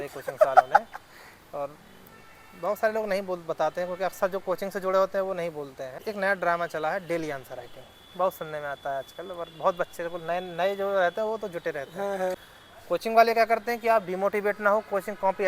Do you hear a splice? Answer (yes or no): yes